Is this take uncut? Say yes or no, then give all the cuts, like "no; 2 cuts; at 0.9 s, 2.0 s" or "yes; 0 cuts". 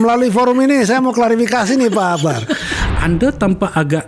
no; 1 cut; at 2.7 s